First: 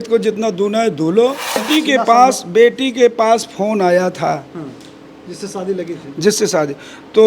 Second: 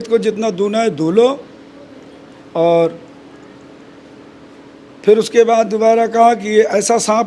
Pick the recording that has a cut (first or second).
first